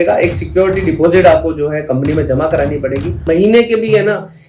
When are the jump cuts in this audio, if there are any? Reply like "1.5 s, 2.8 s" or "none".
3.2 s